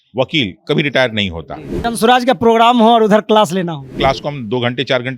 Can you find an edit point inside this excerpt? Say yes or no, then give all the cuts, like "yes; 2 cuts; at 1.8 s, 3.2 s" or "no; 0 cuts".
yes; 2 cuts; at 1.8 s, 3.9 s